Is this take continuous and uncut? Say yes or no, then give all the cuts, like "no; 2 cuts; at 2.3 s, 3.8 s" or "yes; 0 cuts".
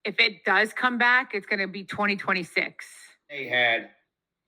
no; 1 cut; at 3.4 s